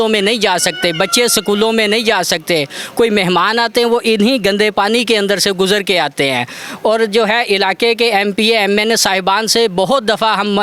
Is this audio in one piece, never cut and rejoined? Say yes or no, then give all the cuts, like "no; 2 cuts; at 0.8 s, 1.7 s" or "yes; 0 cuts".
yes; 0 cuts